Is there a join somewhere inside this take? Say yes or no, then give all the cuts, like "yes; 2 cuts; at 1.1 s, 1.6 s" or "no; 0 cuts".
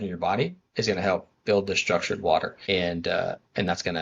yes; 1 cut; at 2.6 s